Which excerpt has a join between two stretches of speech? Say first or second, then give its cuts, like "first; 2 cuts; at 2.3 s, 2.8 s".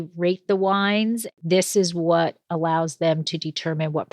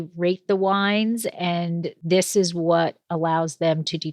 first; 1 cut; at 1.3 s